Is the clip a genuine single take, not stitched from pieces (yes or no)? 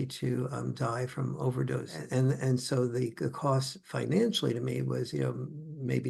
no